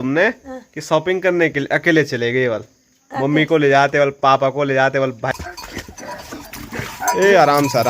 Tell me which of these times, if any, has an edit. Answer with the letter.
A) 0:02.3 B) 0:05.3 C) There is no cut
B